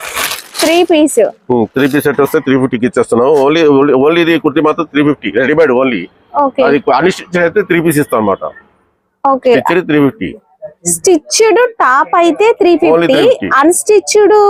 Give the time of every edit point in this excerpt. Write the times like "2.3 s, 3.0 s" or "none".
none